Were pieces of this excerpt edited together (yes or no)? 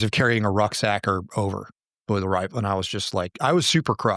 no